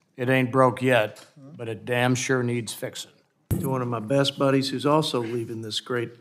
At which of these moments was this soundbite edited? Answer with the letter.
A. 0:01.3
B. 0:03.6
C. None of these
B